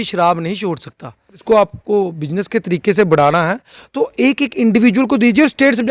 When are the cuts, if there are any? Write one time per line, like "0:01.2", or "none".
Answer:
0:01.4